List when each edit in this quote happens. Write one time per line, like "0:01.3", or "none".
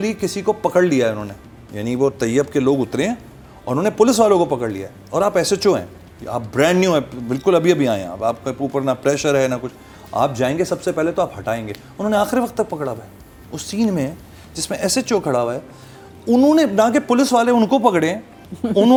none